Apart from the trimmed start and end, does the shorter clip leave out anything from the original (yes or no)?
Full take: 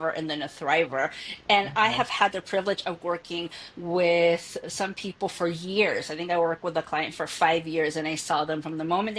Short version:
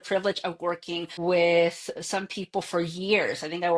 yes